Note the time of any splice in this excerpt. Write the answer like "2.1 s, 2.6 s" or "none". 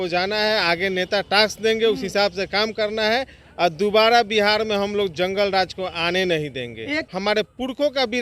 7.1 s